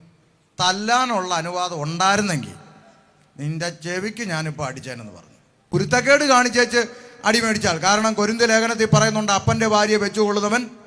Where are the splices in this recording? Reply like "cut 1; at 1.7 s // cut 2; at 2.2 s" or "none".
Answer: cut 1; at 5.7 s